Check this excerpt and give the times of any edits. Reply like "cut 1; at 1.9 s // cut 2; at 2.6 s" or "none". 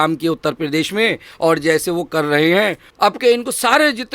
cut 1; at 2.8 s